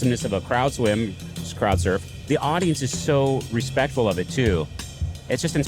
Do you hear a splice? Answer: yes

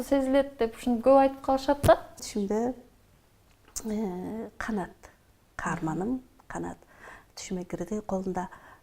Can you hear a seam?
yes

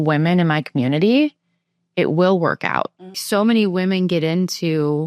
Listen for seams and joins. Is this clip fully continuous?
no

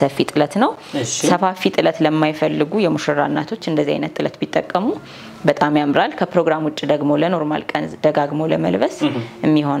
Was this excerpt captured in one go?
yes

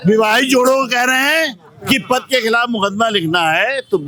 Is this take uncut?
yes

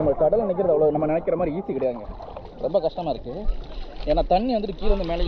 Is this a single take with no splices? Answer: yes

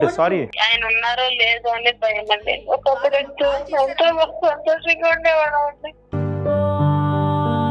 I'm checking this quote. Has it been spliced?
yes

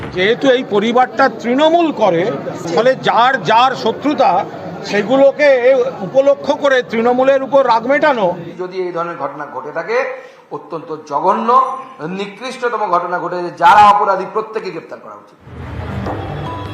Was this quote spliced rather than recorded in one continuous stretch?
yes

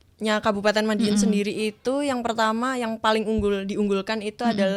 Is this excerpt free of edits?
yes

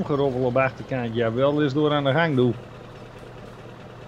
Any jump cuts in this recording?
no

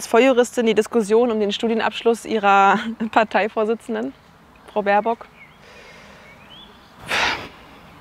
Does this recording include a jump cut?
no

